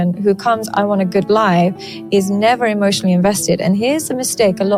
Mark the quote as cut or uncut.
uncut